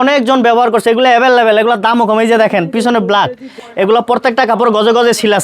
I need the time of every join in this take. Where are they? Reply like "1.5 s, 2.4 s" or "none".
3.6 s

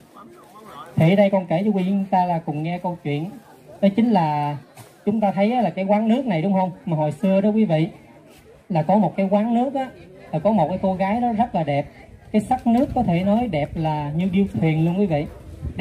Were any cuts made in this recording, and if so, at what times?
none

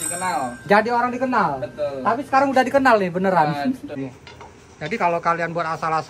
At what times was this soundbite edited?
3.9 s

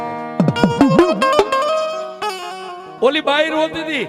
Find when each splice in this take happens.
2.0 s

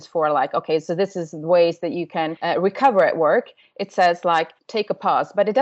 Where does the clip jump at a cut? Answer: 2.4 s, 4.6 s

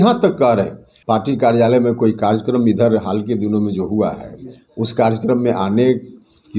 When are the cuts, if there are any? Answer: 1.0 s

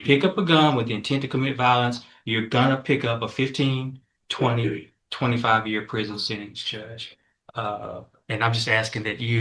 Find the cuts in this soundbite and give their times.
none

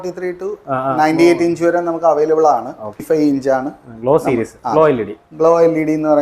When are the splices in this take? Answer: 2.9 s

